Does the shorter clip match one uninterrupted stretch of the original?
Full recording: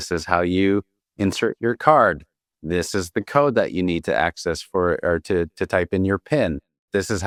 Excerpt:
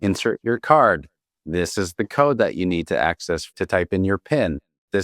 no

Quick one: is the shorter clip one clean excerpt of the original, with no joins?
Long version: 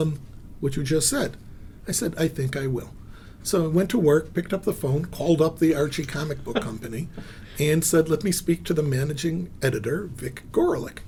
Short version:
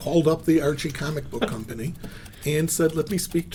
yes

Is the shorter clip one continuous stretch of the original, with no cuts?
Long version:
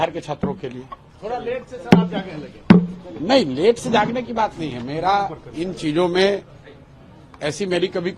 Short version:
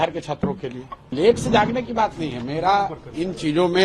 no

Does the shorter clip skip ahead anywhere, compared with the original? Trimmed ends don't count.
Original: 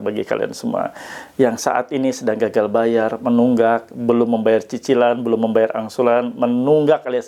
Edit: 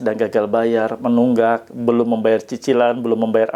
no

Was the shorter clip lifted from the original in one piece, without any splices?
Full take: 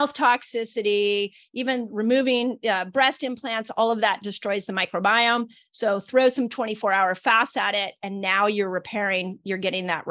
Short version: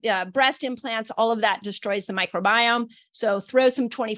yes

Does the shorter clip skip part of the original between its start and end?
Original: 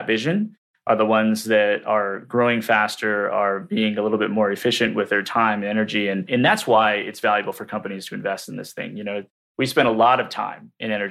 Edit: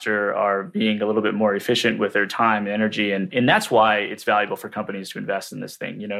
no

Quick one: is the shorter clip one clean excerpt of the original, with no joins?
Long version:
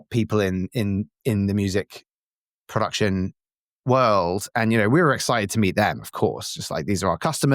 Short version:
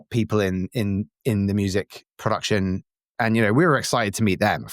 no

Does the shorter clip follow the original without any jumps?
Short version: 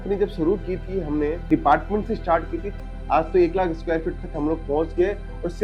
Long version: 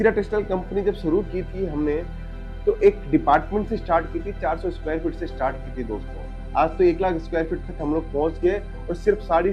no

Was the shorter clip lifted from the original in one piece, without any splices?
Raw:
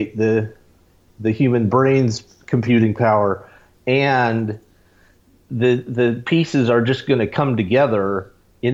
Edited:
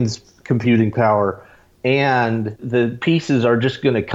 no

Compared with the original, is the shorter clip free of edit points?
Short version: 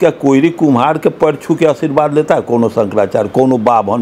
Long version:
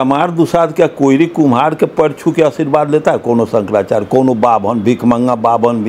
yes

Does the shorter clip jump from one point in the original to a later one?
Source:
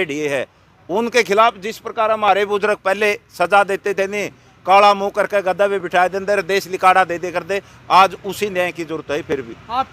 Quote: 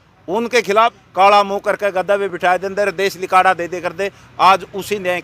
yes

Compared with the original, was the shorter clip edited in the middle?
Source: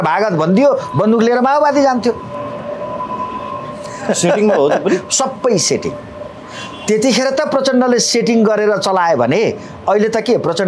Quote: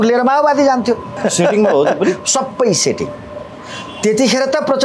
yes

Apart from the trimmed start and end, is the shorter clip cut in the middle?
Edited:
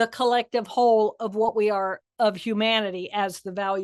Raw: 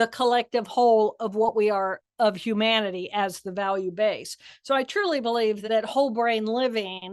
no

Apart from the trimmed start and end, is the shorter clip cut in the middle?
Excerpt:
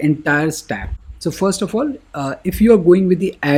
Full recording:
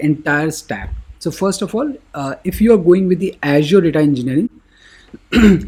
no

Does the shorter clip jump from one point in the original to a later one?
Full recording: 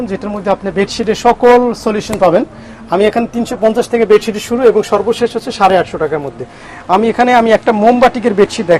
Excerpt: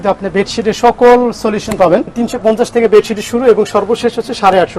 yes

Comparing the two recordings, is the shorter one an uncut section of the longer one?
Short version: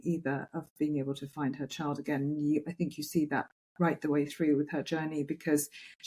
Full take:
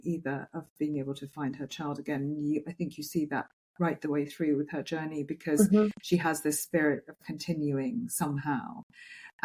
yes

